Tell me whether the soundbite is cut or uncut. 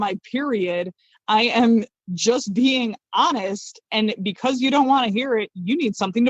uncut